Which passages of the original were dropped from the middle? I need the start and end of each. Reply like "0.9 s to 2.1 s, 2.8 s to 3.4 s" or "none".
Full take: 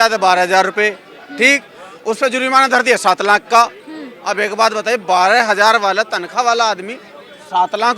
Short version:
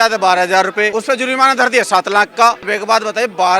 0.9 s to 2.0 s, 3.8 s to 4.4 s